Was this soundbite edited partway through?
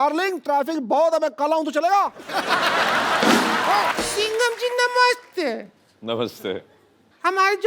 yes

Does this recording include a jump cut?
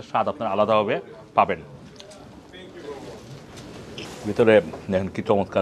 yes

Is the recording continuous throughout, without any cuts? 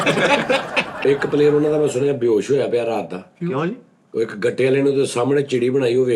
no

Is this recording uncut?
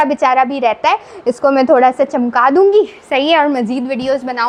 yes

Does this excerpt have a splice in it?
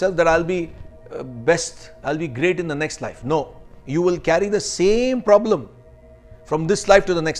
no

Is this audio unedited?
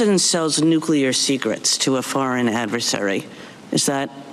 yes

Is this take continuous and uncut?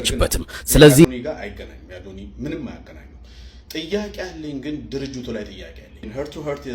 no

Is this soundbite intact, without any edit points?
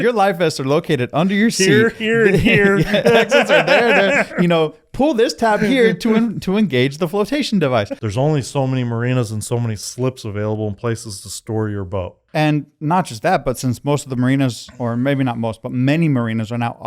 no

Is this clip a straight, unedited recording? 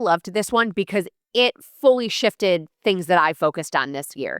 yes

